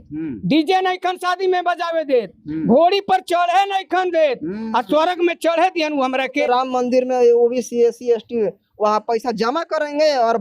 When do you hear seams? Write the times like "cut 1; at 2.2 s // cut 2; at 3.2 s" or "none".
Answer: cut 1; at 6.4 s